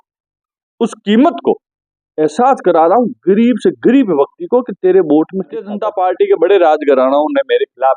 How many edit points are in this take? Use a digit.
1